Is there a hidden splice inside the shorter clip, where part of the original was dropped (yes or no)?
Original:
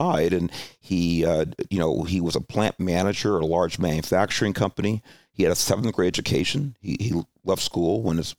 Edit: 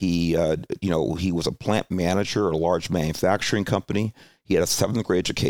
no